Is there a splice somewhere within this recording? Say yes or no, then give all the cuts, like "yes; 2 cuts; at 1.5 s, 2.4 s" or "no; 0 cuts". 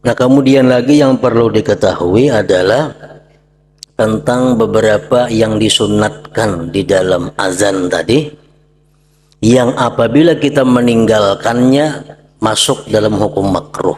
no; 0 cuts